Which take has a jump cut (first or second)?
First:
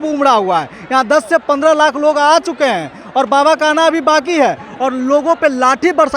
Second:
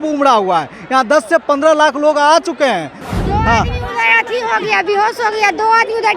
second